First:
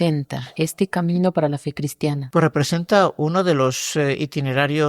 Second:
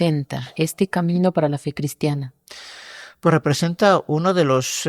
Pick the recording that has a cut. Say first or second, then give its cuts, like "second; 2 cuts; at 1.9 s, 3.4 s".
first; 1 cut; at 2.2 s